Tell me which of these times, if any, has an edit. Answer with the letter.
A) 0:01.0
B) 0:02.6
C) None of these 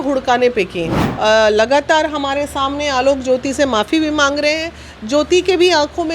A